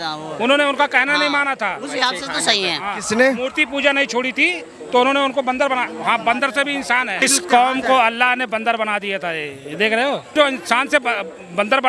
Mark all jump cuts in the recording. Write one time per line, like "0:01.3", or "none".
0:07.2
0:10.3